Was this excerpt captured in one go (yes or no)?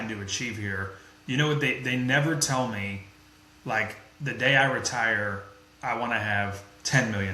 yes